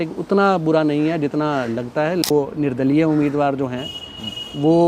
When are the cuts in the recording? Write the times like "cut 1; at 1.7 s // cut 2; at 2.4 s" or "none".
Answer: cut 1; at 2.3 s